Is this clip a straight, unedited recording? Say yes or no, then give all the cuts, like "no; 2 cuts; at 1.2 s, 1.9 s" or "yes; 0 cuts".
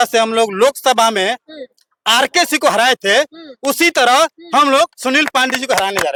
yes; 0 cuts